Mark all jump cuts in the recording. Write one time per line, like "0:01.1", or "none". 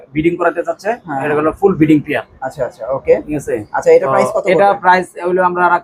none